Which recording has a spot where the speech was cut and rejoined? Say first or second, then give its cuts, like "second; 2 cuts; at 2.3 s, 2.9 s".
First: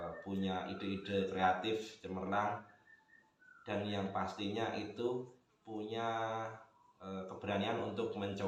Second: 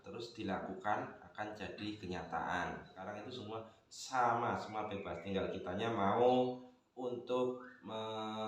second; 1 cut; at 3.1 s